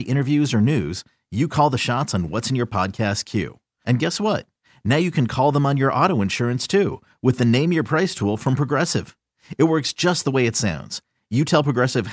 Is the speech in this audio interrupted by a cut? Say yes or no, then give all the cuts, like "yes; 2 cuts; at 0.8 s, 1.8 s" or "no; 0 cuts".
no; 0 cuts